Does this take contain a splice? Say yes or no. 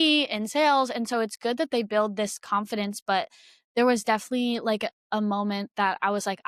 no